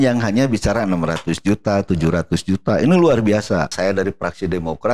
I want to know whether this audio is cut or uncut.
cut